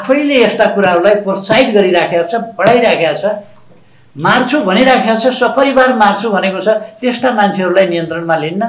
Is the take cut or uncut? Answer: uncut